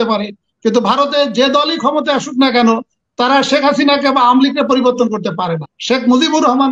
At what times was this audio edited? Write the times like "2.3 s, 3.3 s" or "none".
5.7 s

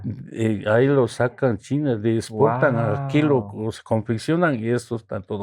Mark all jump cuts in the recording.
none

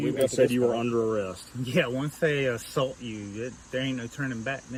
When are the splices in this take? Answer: none

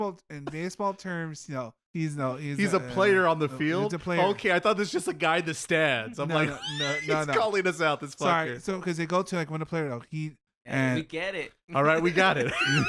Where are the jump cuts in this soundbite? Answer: 10.4 s

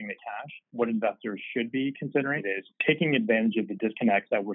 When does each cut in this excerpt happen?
2.4 s

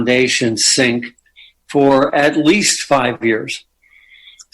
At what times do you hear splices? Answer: none

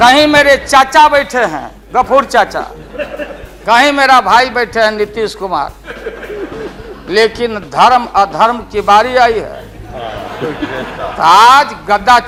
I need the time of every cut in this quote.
none

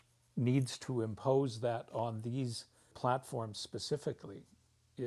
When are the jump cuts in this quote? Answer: 2.8 s

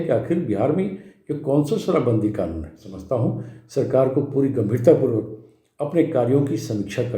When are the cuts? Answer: 2.9 s

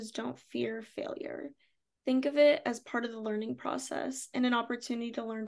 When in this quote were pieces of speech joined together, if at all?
none

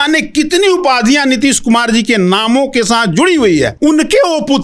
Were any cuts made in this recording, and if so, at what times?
3.7 s

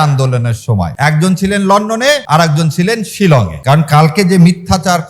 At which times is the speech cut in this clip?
0.9 s, 2.2 s, 3.5 s

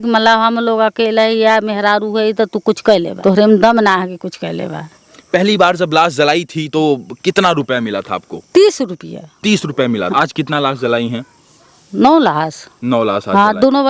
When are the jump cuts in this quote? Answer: 3.1 s, 5.2 s, 10.1 s

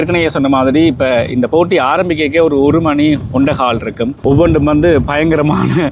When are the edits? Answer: 4.2 s

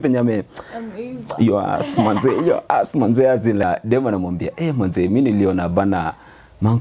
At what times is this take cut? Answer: 3.6 s

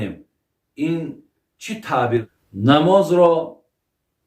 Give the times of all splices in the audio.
2.3 s

